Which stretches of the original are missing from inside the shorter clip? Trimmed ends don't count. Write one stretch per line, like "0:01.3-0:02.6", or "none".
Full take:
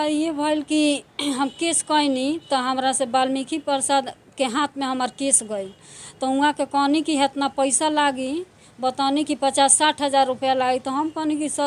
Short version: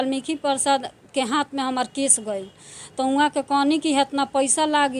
none

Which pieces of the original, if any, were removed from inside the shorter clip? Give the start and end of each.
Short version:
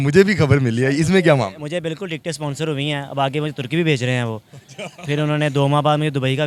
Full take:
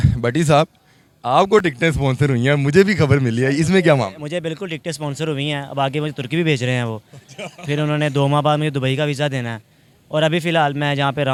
none

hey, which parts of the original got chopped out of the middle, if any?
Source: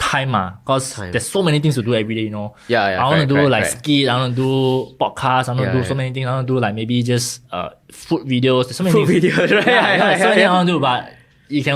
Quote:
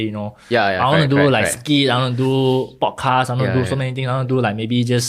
none

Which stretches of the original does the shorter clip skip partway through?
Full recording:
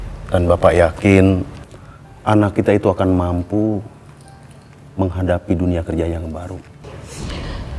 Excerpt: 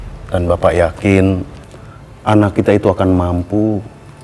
none

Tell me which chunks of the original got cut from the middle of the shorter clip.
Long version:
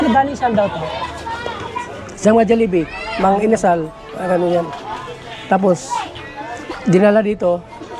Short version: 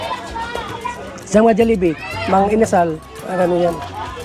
none

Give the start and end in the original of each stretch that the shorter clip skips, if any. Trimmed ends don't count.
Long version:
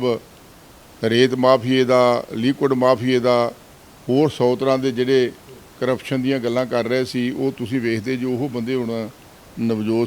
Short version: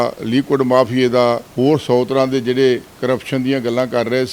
0:03.6-0:04.0
0:05.4-0:05.7

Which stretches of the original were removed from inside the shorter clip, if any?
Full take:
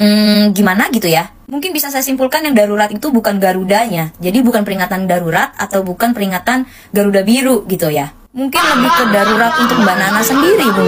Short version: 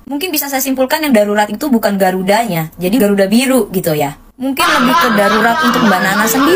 0:04.4-0:06.9

